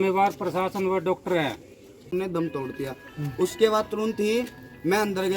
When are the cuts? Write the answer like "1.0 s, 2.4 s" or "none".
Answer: 2.1 s